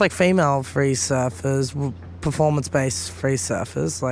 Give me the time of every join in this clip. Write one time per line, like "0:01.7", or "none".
none